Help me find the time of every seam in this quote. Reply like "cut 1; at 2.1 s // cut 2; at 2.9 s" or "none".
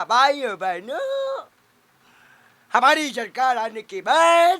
none

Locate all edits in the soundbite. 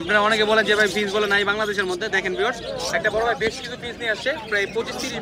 none

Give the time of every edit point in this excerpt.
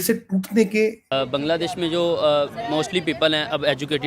cut 1; at 1.0 s

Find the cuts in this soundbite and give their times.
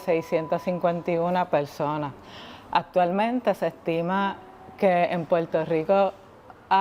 none

